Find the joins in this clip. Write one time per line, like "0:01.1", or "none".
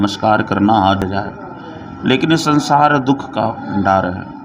0:01.0